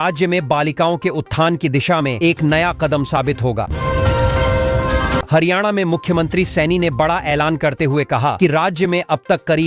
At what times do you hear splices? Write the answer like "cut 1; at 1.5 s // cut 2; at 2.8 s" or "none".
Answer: cut 1; at 3.7 s // cut 2; at 5.3 s

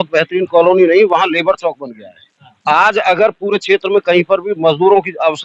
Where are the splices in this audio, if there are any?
none

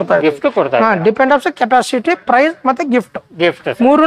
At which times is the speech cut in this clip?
none

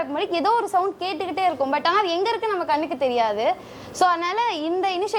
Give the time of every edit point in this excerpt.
none

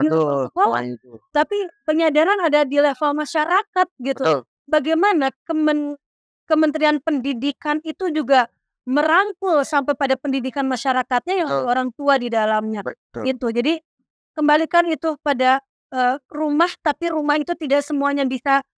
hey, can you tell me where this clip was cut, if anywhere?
none

